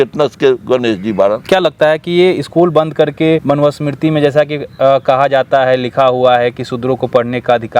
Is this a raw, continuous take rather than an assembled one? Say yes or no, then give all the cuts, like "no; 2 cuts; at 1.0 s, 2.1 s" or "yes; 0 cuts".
no; 2 cuts; at 1.4 s, 3.4 s